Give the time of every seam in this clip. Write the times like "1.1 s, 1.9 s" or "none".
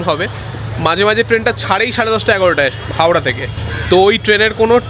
3.1 s